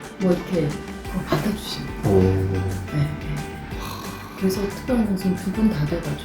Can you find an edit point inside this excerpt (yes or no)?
no